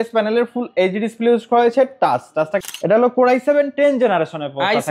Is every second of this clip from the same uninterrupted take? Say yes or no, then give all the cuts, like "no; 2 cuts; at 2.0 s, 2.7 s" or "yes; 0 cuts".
no; 1 cut; at 2.6 s